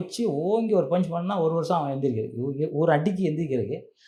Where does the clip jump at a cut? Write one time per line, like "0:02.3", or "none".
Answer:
none